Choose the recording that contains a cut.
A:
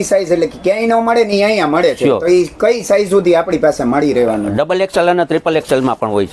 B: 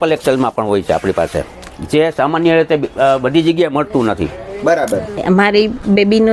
B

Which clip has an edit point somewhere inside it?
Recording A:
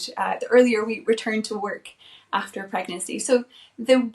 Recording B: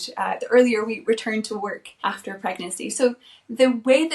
B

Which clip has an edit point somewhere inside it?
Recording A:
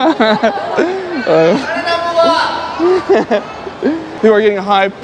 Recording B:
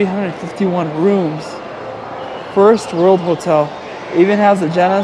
A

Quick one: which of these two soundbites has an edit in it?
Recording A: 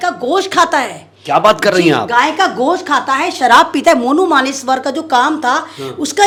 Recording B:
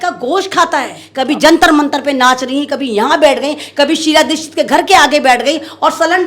B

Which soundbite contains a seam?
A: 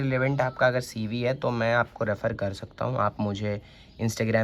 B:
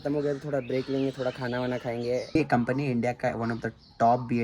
B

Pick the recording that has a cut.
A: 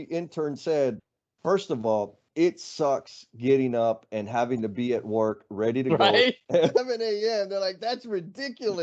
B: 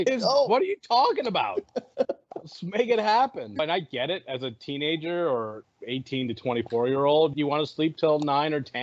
B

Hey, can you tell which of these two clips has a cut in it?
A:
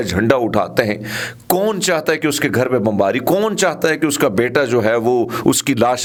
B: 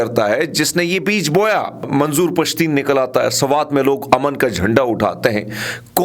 B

